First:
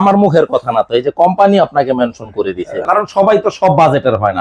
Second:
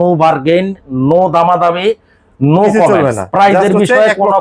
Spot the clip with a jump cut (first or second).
first